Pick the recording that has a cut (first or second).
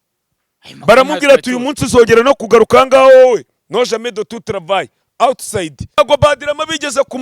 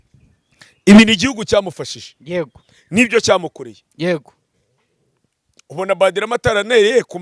first